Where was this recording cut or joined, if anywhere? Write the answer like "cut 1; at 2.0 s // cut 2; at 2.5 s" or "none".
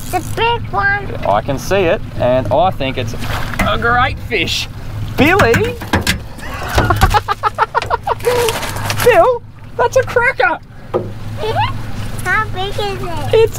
none